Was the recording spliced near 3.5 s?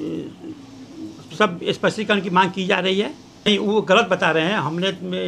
yes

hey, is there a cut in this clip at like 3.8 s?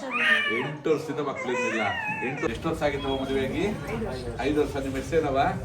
no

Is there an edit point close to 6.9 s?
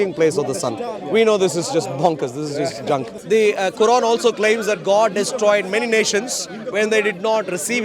no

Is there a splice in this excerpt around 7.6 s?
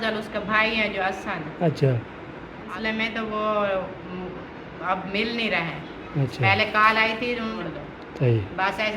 yes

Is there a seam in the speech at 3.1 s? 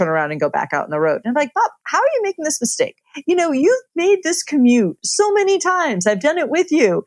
yes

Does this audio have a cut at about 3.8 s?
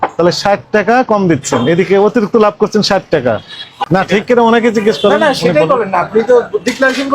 yes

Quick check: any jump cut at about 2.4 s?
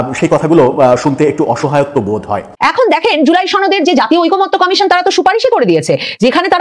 yes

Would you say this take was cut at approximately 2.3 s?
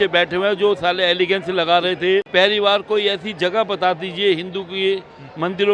yes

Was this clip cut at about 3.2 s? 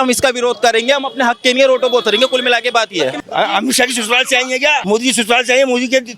yes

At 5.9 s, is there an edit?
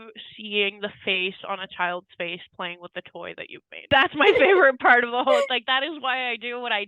no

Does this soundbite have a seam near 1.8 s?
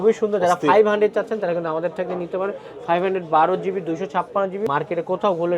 no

